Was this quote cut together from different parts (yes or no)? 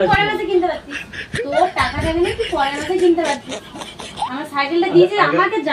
no